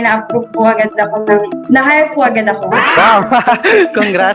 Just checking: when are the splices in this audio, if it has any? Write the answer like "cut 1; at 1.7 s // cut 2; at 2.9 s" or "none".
none